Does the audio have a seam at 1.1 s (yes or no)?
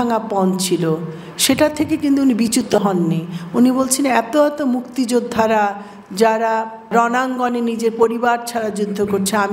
no